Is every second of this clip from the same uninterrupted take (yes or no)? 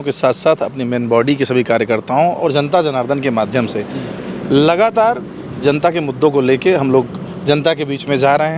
yes